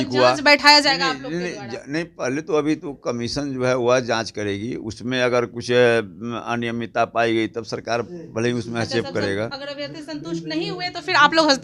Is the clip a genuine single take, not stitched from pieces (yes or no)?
yes